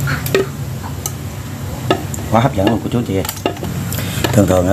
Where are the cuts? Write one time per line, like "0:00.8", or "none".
0:03.8